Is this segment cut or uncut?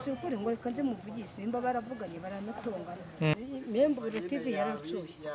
cut